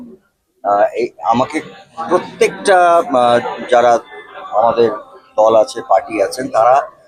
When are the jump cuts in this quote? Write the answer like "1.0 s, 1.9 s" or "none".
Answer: none